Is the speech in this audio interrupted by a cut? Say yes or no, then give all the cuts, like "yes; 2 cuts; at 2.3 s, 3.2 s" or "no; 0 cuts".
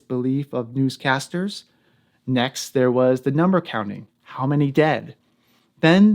no; 0 cuts